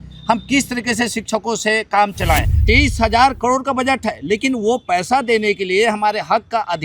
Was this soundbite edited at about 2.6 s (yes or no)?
yes